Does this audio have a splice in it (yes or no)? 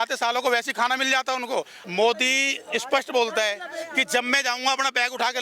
yes